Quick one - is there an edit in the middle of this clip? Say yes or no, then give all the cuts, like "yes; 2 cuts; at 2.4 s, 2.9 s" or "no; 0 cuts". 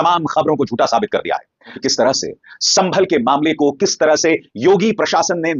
yes; 1 cut; at 1.8 s